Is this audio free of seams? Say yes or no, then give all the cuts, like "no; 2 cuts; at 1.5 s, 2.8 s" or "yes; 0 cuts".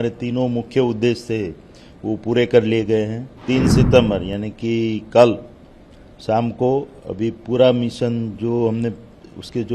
no; 1 cut; at 3.3 s